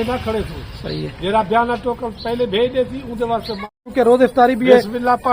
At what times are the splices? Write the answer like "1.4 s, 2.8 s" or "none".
3.8 s